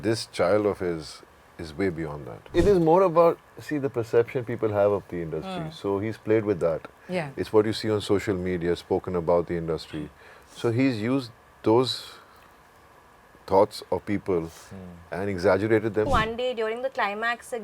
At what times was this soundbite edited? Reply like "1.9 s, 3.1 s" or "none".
2.5 s, 16.1 s